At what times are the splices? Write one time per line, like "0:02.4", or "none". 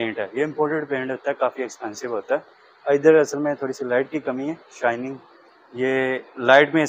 none